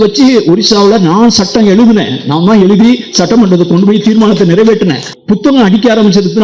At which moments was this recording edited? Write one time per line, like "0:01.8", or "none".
0:05.1